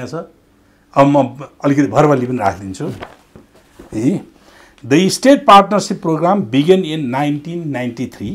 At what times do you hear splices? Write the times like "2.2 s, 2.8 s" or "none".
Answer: none